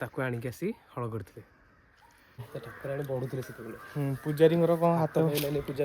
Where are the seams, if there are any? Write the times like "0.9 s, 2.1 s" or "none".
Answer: 2.5 s